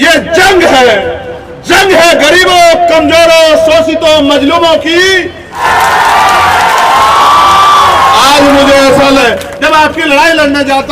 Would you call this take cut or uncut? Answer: cut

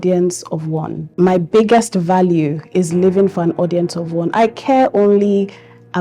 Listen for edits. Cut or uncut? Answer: cut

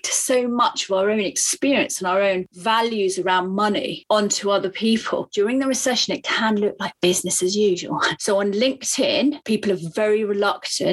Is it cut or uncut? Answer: cut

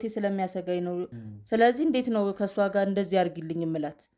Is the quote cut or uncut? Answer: cut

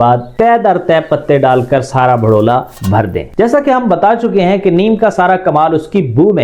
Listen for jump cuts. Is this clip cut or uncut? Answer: uncut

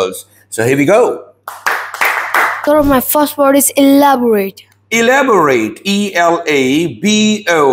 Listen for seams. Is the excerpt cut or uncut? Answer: cut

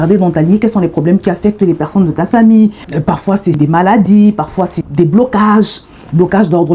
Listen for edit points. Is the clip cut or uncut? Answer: cut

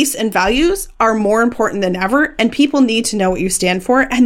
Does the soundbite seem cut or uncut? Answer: uncut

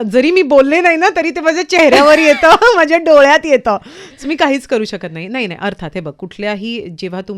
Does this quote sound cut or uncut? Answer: uncut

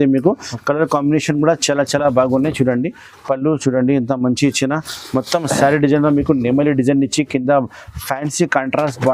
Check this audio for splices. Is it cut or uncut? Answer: uncut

